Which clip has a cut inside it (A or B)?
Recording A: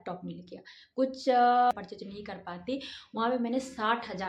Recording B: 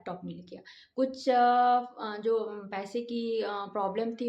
A